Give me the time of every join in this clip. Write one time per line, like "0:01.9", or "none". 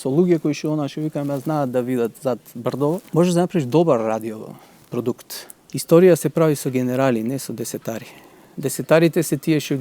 0:03.1
0:05.7